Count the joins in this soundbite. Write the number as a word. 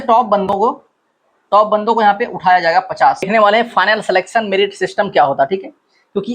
one